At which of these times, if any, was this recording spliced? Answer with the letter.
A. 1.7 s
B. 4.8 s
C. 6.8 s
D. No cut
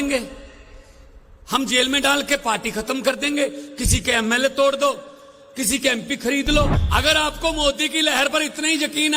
C